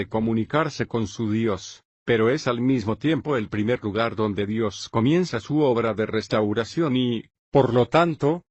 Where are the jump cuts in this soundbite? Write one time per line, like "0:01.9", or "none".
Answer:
0:02.6

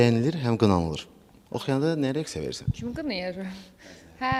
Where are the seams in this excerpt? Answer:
none

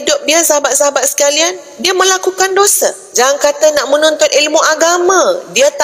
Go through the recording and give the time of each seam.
0:03.0

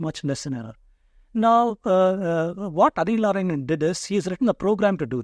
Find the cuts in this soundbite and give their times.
none

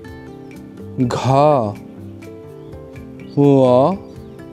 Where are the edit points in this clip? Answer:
none

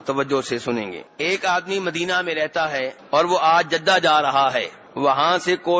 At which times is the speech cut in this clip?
0:01.0
0:03.0
0:04.8

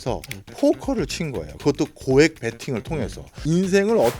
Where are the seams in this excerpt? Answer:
0:03.3

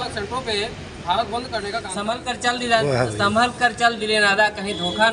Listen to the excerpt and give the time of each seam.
0:02.0

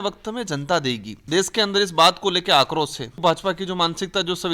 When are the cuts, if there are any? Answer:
0:01.1
0:03.2

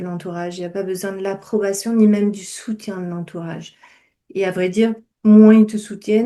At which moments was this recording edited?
none

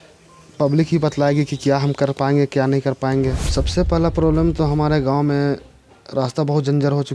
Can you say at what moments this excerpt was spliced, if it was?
0:03.4

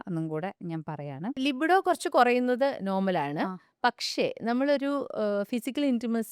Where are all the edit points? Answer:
0:01.4

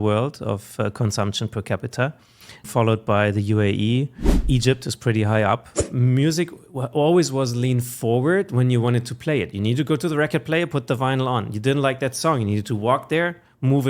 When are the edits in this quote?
0:02.7
0:04.4
0:05.8

